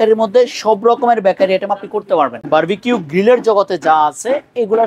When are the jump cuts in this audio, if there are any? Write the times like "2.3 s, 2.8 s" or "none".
2.4 s